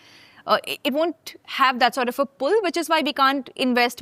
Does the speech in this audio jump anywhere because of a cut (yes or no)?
no